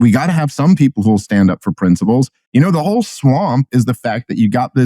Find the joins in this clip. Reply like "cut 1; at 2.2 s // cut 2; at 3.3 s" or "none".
cut 1; at 2.4 s